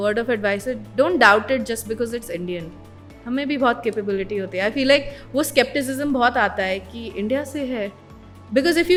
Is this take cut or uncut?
uncut